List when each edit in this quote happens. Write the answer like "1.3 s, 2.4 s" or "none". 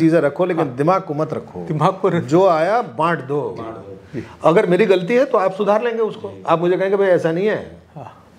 none